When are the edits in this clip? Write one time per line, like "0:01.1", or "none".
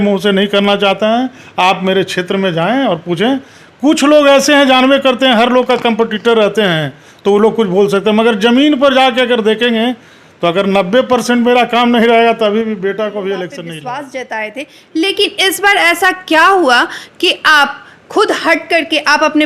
0:13.7